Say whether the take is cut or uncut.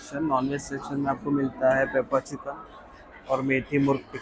uncut